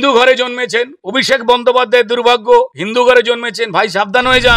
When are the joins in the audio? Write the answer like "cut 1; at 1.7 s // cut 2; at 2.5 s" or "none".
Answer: none

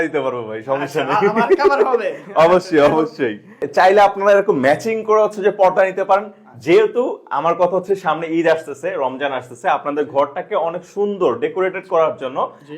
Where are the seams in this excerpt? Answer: cut 1; at 3.6 s

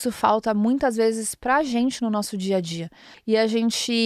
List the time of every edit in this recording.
cut 1; at 3.1 s

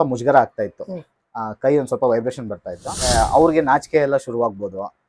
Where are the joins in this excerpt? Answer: cut 1; at 3.1 s

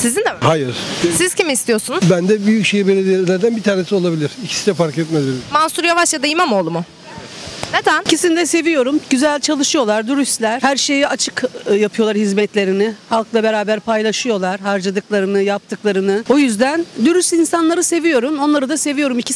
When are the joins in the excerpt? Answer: none

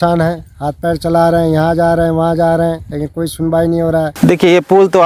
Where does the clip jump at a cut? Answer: cut 1; at 4.1 s

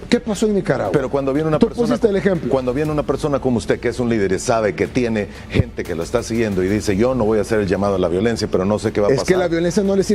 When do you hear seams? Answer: none

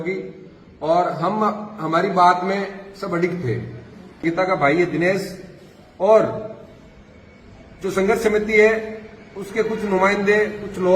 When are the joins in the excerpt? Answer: cut 1; at 4.2 s

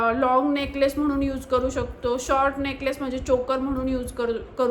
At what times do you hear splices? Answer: none

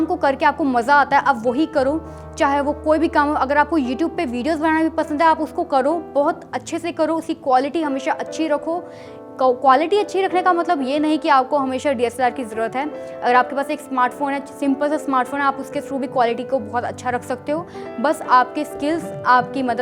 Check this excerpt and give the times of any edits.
none

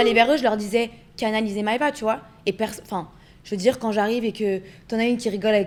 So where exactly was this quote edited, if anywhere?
none

